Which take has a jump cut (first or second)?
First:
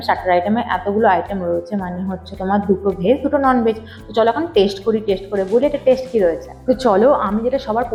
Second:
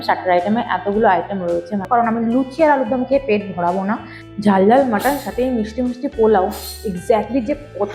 second